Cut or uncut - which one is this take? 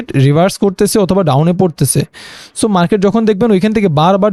uncut